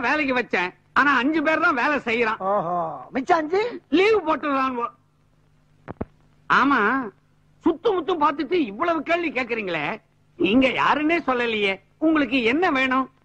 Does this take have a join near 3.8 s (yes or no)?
no